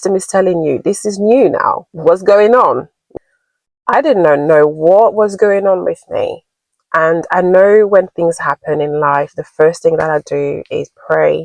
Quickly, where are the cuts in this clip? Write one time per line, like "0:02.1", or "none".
0:03.1